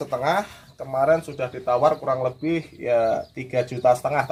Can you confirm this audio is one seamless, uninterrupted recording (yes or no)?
yes